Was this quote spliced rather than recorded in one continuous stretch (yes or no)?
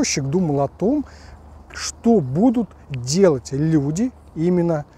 no